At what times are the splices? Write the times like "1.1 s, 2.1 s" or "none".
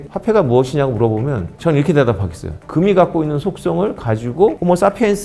1.5 s, 2.6 s